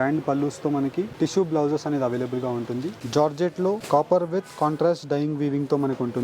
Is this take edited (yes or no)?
yes